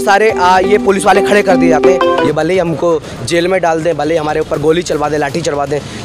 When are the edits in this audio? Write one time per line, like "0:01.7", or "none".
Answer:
0:02.2